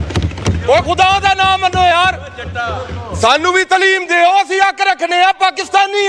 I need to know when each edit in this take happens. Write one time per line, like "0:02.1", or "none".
none

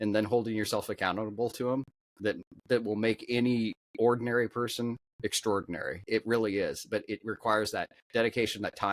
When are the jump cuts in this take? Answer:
0:06.0

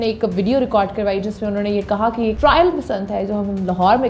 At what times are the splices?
0:02.4

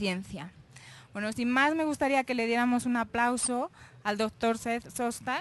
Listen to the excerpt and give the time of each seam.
0:02.5

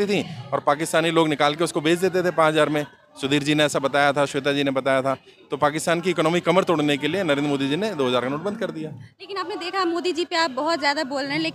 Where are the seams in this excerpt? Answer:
none

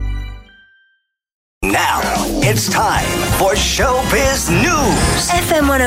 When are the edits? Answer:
0:01.4

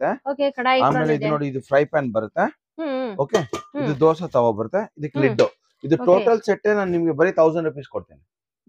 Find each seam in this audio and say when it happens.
none

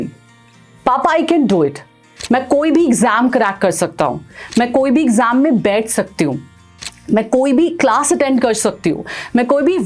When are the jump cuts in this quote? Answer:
none

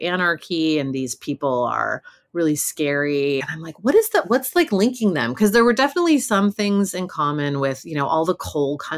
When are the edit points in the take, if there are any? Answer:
0:03.5

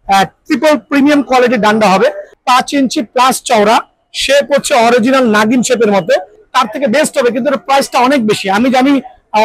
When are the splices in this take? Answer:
0:02.3
0:06.4

